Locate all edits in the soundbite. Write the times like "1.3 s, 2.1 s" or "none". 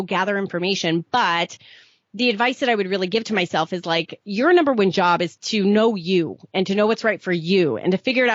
5.4 s